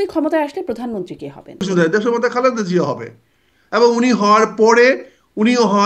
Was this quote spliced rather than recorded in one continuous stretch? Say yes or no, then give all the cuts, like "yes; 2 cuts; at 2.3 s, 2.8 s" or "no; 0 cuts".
yes; 1 cut; at 1.6 s